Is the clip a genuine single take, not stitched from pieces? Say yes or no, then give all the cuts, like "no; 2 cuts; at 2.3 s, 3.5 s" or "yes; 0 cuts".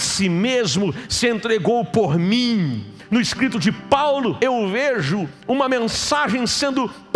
no; 2 cuts; at 3.0 s, 4.4 s